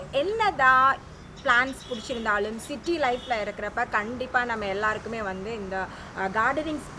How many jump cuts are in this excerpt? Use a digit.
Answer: 0